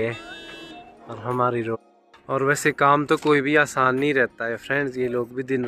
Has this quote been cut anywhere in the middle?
yes; 1 cut; at 1.8 s

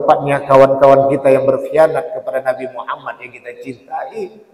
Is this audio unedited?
yes; 0 cuts

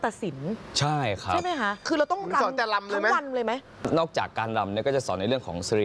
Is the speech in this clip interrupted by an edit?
yes; 2 cuts; at 1.8 s, 3.7 s

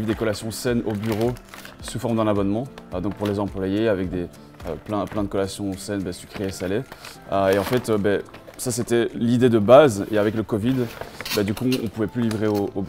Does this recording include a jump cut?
no; 0 cuts

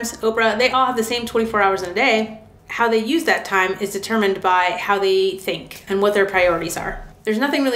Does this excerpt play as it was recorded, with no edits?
yes; 0 cuts

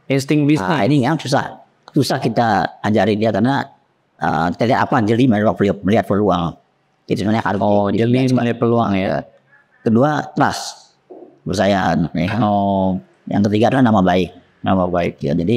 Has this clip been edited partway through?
no; 0 cuts

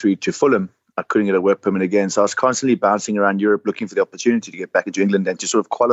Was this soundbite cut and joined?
no; 0 cuts

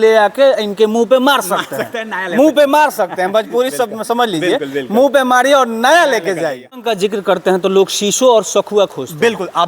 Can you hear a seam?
yes; 1 cut; at 6.8 s

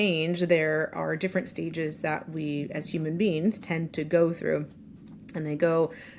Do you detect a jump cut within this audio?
no; 0 cuts

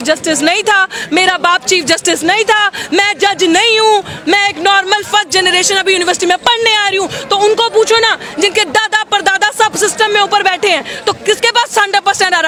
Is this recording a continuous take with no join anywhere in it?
yes; 0 cuts

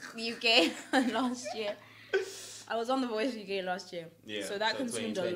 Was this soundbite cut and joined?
no; 0 cuts

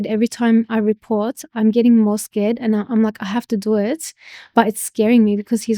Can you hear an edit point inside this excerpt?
no; 0 cuts

